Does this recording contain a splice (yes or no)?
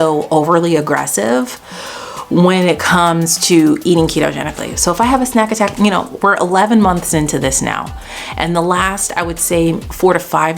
no